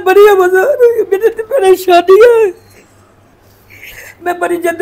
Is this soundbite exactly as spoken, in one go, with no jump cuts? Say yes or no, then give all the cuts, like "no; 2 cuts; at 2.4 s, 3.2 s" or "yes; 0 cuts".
yes; 0 cuts